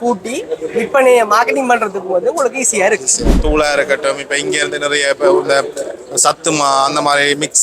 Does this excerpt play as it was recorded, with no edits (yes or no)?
no